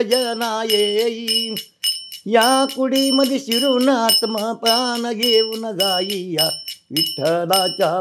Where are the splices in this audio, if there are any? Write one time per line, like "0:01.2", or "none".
none